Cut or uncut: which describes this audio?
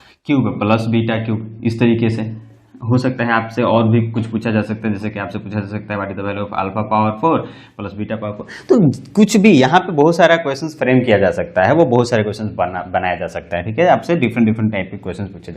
uncut